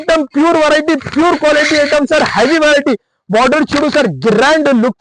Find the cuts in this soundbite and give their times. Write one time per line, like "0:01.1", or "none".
none